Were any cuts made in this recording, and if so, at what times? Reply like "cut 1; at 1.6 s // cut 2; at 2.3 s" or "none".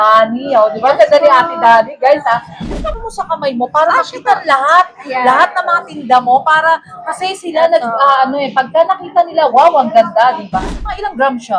cut 1; at 2.8 s // cut 2; at 10.8 s